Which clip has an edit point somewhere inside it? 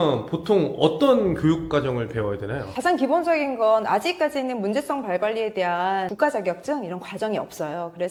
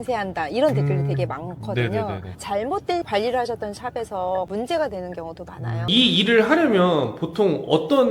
second; 1 cut; at 5.8 s

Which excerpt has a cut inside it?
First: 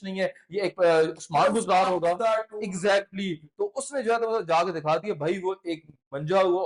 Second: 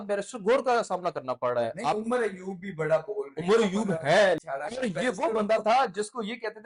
second; 1 cut; at 4.4 s

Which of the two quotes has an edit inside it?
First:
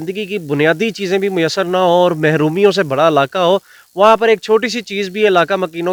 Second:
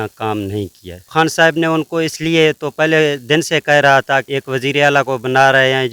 second; 2 cuts; at 1.1 s, 4.3 s

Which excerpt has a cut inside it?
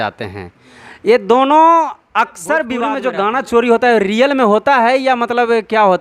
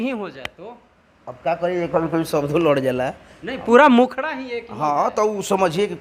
first; 1 cut; at 2.8 s

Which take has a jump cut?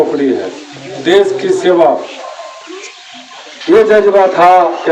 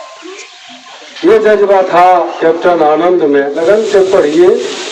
second; 1 cut; at 3.6 s

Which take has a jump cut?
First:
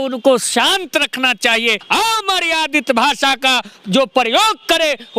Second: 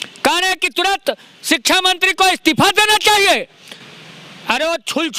first; 1 cut; at 1.8 s

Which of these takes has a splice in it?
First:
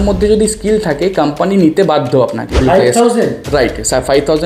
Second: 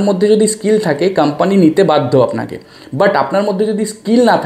first; 1 cut; at 2.5 s

